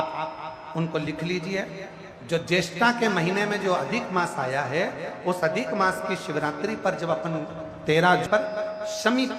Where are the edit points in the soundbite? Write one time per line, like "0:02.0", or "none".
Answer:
0:08.2